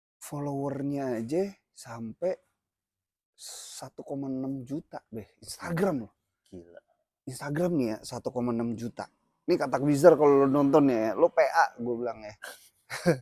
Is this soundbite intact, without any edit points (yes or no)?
yes